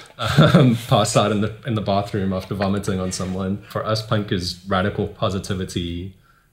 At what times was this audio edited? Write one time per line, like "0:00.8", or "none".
0:03.7